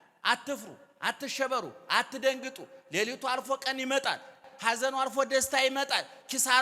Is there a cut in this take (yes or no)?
yes